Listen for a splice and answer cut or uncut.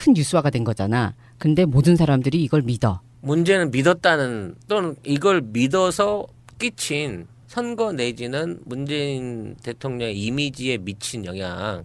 cut